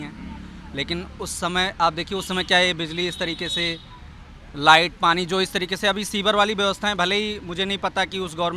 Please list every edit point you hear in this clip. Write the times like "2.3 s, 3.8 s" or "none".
none